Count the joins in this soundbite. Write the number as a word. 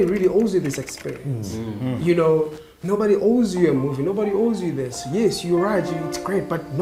zero